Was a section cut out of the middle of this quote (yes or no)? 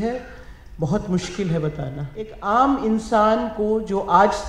yes